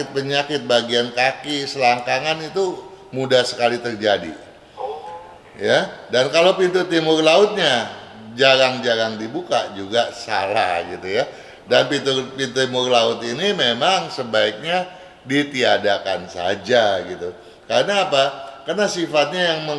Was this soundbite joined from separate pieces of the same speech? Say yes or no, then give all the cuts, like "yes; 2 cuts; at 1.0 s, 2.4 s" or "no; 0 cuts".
no; 0 cuts